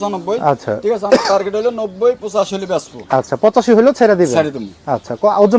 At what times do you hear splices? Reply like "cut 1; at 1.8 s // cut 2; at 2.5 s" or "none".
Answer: none